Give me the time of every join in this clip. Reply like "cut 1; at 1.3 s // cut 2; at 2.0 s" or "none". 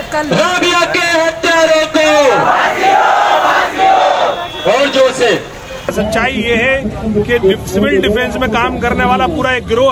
cut 1; at 5.9 s

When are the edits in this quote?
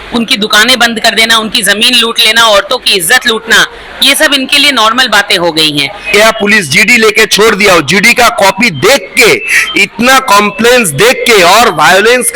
cut 1; at 6.1 s

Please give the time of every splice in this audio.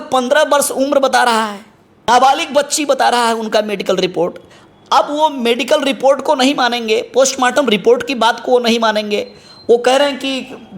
cut 1; at 2.1 s

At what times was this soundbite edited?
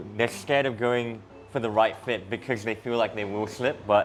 none

